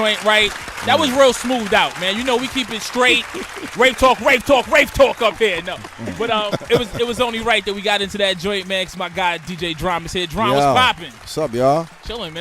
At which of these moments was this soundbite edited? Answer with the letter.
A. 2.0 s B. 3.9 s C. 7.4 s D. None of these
C